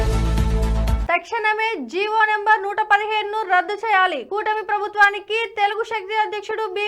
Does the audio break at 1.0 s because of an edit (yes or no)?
yes